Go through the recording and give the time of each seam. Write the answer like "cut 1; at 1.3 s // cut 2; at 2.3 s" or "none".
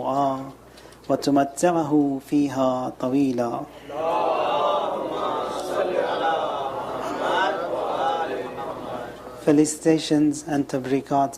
cut 1; at 10.4 s